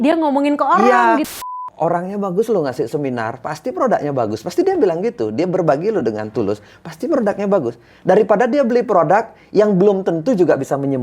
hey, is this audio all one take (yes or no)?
no